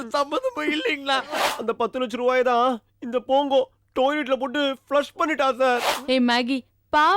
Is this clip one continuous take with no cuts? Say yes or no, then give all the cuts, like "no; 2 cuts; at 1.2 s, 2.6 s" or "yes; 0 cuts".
no; 2 cuts; at 1.3 s, 5.9 s